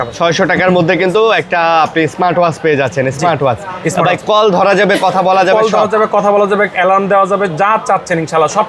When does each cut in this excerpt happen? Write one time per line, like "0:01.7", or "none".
none